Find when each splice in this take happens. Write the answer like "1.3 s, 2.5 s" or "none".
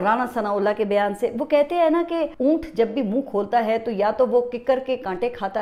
none

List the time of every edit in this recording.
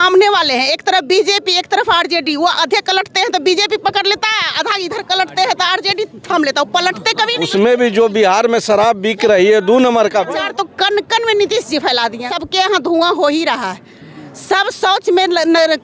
7.4 s, 10.3 s, 12.4 s

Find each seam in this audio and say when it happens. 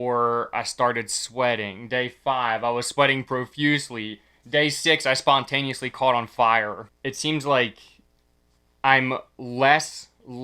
6.8 s

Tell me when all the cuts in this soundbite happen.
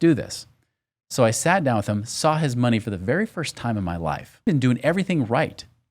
4.5 s

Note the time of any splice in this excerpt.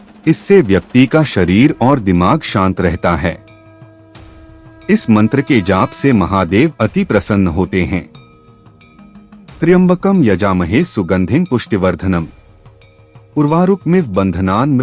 3.4 s, 4.9 s

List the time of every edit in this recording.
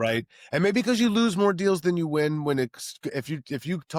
none

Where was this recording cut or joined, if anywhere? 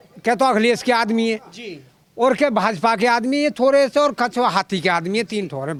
none

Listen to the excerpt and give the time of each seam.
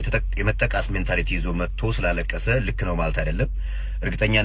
none

